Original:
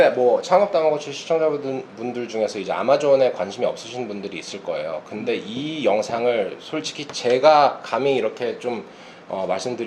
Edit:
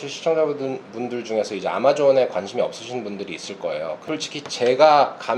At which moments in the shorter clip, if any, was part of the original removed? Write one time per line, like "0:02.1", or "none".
0:04.0